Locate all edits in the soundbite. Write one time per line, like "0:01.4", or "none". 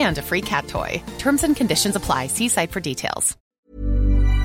0:03.4